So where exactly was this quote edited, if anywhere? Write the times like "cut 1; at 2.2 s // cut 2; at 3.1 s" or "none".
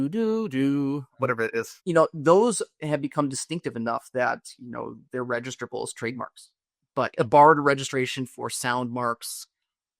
cut 1; at 1.7 s